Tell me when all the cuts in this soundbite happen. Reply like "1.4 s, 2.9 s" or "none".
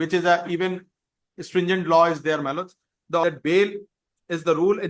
3.2 s